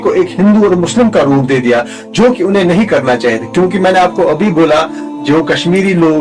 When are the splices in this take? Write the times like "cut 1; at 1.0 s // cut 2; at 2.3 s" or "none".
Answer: none